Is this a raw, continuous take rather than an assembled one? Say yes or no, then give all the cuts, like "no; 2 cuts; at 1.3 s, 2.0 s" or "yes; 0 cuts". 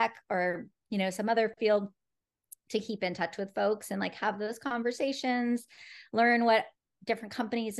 yes; 0 cuts